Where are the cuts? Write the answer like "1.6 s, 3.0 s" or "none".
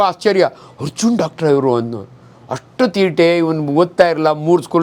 none